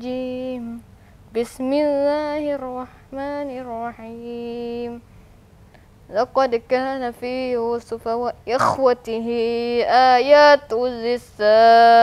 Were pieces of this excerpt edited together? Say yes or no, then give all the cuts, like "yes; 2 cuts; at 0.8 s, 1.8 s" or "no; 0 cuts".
no; 0 cuts